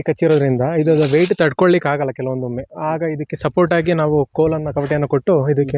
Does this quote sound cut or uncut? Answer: uncut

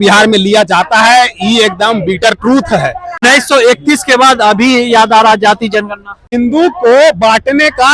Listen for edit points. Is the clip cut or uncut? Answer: cut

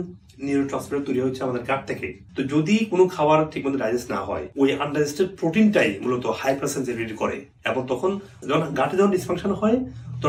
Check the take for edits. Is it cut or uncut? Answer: uncut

